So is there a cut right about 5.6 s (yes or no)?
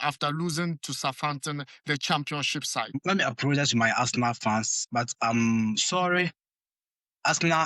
no